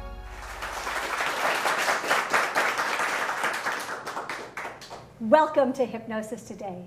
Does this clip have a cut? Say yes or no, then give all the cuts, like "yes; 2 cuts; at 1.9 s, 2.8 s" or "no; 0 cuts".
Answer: yes; 1 cut; at 2.2 s